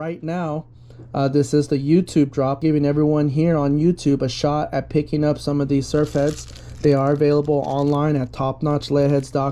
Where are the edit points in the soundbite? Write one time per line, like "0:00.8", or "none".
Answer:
0:02.6